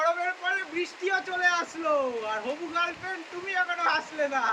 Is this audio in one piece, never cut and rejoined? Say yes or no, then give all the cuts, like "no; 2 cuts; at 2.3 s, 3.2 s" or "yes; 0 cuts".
yes; 0 cuts